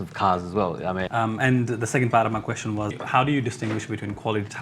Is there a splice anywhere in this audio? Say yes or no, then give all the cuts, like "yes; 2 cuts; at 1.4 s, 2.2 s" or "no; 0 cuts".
yes; 2 cuts; at 1.1 s, 2.9 s